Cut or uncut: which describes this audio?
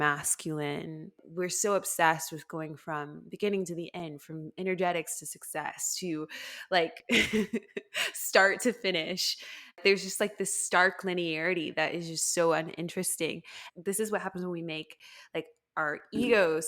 cut